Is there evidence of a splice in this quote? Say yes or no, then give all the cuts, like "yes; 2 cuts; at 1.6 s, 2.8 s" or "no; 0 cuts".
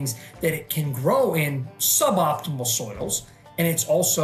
no; 0 cuts